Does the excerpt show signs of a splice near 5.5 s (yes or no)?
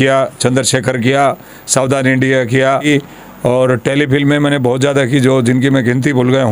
no